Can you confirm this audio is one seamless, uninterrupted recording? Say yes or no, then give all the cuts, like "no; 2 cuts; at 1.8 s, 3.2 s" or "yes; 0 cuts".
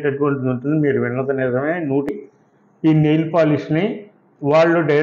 no; 1 cut; at 2.1 s